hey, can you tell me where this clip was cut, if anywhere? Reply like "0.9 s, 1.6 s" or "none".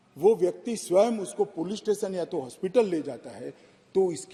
none